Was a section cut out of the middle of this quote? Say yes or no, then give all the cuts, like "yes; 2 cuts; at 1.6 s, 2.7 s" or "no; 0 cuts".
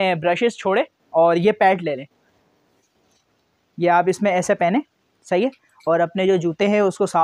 no; 0 cuts